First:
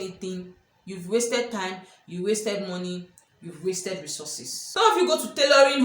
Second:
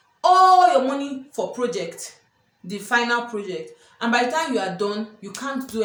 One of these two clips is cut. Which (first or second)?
first